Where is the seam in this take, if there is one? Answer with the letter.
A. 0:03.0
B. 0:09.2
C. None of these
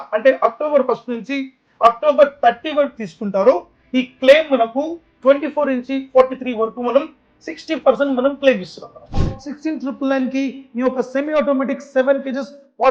B